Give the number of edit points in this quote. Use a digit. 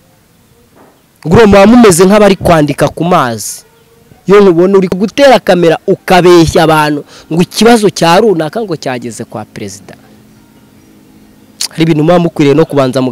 1